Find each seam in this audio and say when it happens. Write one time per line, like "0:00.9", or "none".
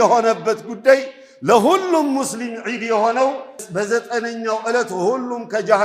0:03.6